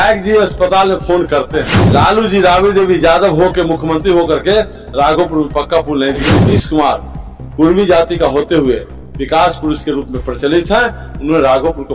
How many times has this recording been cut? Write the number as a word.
two